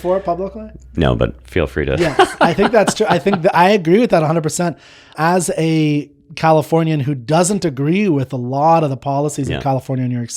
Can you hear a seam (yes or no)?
yes